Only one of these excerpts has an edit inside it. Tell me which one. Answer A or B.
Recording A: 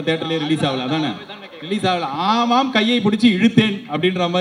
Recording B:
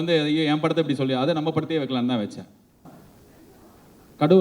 B